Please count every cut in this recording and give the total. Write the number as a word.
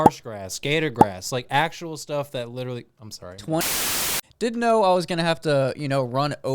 one